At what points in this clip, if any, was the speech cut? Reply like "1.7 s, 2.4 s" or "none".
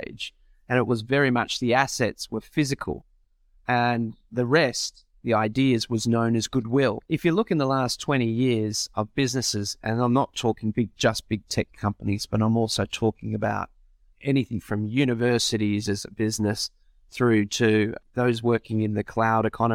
7.0 s, 18.0 s